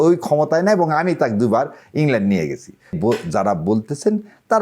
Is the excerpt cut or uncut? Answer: cut